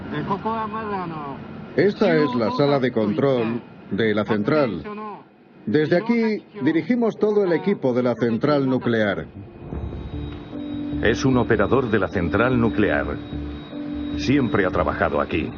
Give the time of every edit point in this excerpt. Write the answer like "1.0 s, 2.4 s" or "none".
8.5 s